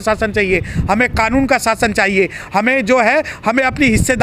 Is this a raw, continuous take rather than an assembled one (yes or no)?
yes